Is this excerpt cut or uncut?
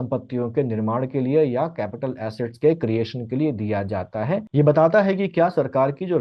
cut